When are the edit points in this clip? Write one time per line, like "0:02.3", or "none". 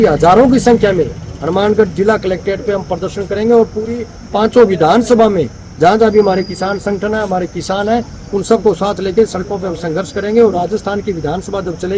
none